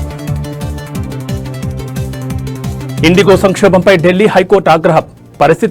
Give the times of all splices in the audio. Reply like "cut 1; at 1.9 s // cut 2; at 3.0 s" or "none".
cut 1; at 1.9 s